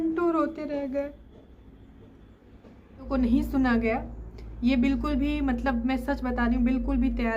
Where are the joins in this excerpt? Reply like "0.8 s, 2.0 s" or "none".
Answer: 3.1 s